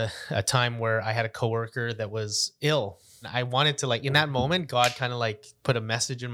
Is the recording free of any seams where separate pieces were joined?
no; 1 cut; at 3.2 s

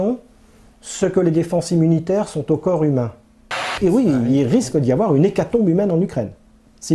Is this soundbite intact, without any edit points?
no; 1 cut; at 3.7 s

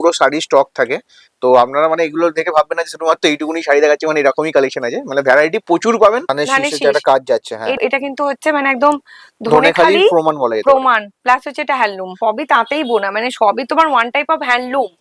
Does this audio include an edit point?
yes; 3 cuts; at 6.3 s, 7.8 s, 12.2 s

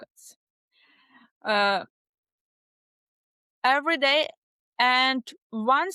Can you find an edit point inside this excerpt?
no; 0 cuts

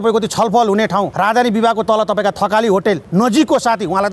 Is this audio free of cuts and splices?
no; 2 cuts; at 1.1 s, 3.0 s

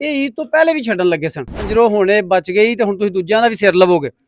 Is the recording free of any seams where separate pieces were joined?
no; 1 cut; at 1.6 s

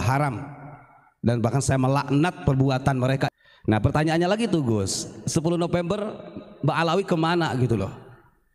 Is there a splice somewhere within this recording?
yes; 1 cut; at 3.3 s

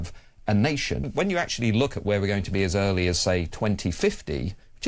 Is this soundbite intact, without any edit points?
no; 1 cut; at 1.0 s

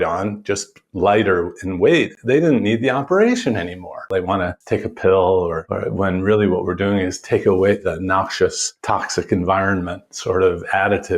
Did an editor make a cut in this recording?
yes; 4 cuts; at 4.4 s, 5.7 s, 7.9 s, 8.7 s

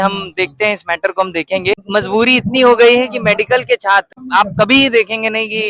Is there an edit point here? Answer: yes; 2 cuts; at 1.8 s, 4.2 s

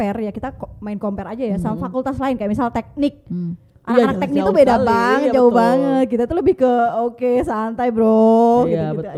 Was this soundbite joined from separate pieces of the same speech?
no; 0 cuts

